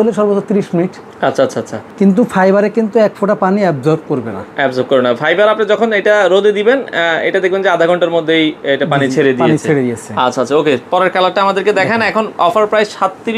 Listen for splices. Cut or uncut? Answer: uncut